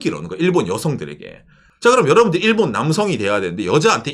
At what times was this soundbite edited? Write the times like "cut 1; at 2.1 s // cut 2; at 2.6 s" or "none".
none